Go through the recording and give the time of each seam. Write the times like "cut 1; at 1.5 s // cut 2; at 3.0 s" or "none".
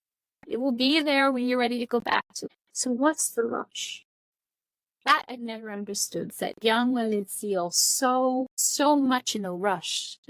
cut 1; at 2.3 s // cut 2; at 8.6 s